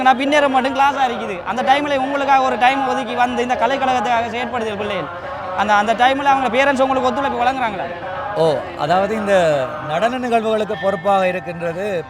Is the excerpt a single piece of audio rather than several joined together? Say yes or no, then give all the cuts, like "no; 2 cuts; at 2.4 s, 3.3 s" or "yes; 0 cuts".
yes; 0 cuts